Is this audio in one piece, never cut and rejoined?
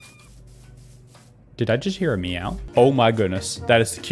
no; 1 cut; at 2.5 s

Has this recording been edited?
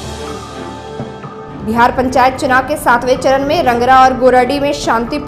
yes; 1 cut; at 1.0 s

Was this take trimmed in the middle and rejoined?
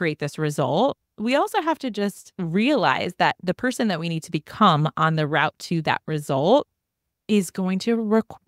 yes; 1 cut; at 2.3 s

